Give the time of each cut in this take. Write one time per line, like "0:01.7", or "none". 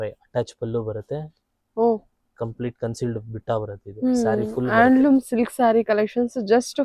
none